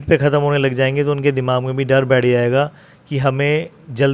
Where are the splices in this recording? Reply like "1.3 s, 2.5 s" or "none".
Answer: none